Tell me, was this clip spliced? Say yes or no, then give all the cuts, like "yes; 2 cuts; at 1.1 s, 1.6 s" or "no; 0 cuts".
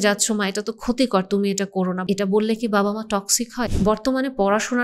yes; 2 cuts; at 2.0 s, 3.6 s